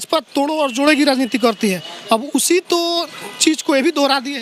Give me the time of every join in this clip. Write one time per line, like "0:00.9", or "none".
none

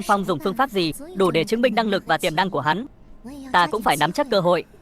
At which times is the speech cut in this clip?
0:01.0

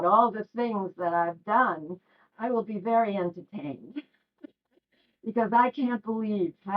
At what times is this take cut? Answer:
0:02.3

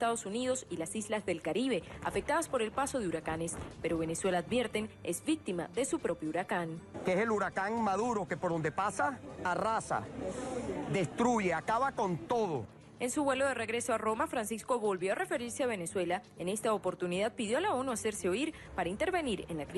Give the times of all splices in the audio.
0:17.8

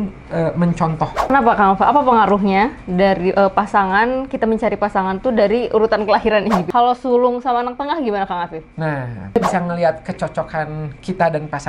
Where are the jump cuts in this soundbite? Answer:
0:01.3
0:06.7
0:09.4

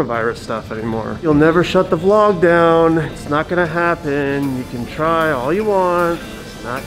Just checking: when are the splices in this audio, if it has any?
0:01.3

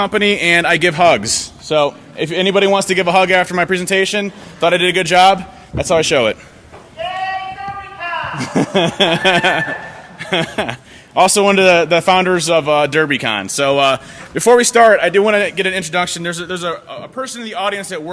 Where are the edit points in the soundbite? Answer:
0:16.3

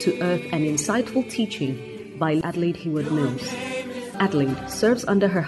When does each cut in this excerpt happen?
0:02.4
0:04.1

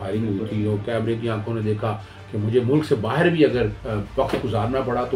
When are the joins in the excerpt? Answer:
0:02.1
0:03.8

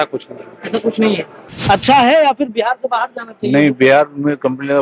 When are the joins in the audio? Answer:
0:01.5

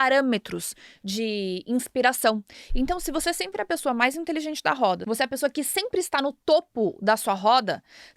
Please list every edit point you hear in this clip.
0:02.6
0:05.0

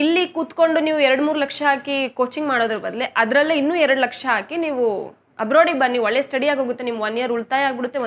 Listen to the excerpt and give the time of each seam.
none

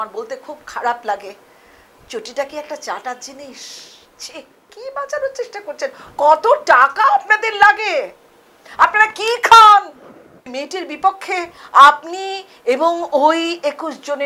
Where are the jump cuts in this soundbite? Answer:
0:04.7
0:10.5

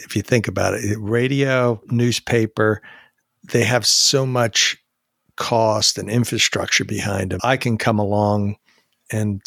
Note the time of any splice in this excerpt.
0:07.4

